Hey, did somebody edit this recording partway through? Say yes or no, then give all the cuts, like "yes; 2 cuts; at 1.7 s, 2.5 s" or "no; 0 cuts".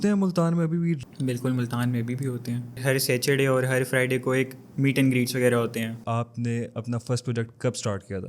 yes; 2 cuts; at 2.8 s, 6.0 s